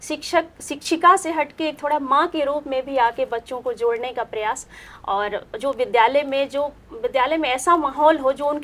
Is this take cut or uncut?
uncut